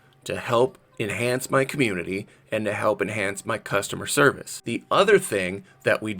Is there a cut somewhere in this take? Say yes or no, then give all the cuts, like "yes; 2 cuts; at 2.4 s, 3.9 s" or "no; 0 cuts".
yes; 1 cut; at 4.5 s